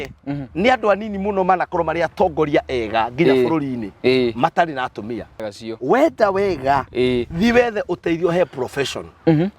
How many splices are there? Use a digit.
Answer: 1